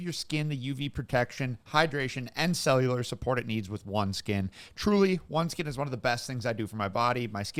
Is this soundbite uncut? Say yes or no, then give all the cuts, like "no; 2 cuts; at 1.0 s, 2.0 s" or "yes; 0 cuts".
yes; 0 cuts